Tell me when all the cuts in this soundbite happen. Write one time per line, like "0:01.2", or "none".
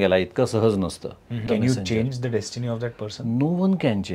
0:01.4